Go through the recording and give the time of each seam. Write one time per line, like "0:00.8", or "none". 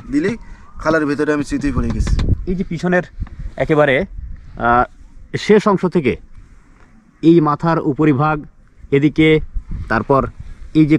0:02.3

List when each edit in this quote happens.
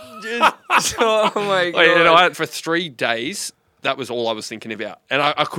0:02.3

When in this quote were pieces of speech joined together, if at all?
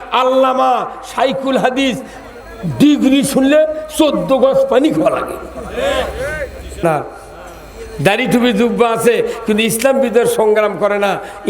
0:06.8

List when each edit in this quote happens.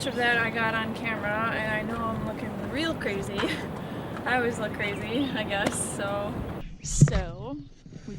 0:06.5

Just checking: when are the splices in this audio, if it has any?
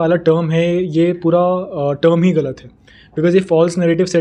none

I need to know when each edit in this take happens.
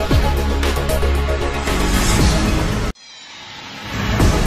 0:02.5

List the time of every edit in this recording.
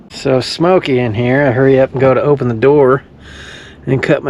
none

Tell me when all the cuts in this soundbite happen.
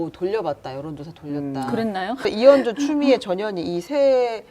0:02.3

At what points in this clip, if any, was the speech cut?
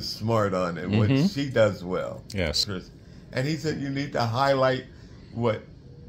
0:02.7

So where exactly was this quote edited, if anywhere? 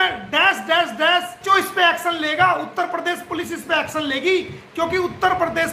0:01.4

